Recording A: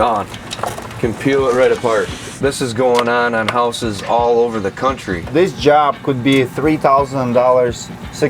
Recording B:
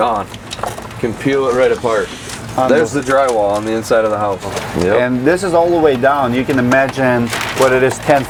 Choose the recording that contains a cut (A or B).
A